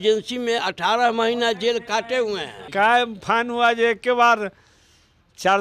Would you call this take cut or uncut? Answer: cut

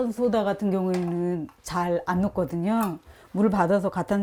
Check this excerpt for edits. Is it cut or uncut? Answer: uncut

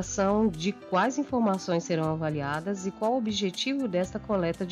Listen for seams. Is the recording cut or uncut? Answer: uncut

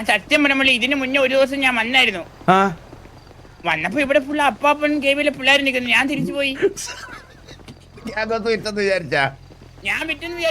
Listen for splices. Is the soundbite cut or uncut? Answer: uncut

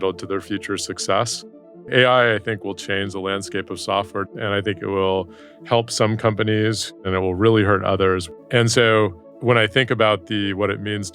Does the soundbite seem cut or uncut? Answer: cut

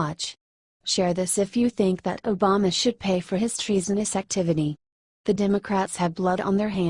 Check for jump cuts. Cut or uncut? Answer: uncut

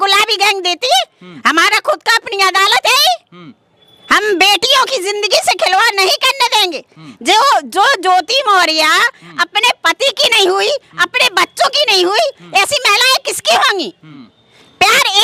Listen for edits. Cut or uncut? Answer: uncut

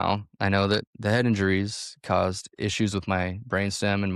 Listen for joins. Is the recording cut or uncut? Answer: uncut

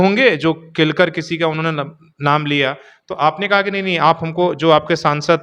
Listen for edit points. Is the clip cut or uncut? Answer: uncut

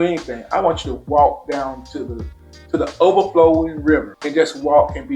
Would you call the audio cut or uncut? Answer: uncut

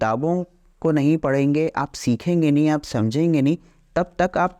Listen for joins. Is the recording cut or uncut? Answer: uncut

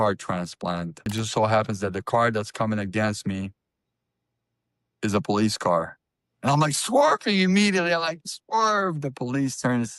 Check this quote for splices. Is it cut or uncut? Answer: cut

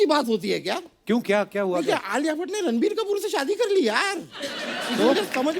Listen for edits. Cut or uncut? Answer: uncut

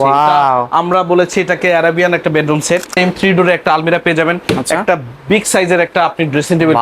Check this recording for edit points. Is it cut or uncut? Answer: cut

